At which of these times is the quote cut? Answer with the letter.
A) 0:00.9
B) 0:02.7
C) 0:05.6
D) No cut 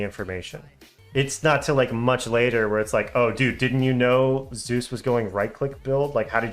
A